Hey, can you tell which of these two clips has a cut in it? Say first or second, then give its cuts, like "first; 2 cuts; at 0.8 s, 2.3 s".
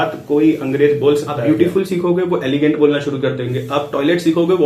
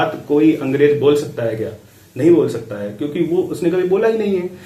first; 1 cut; at 1.3 s